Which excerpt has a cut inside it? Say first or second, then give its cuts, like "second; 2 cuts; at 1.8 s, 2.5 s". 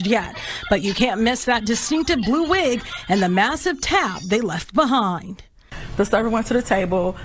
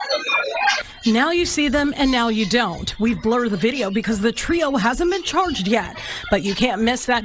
first; 1 cut; at 2.9 s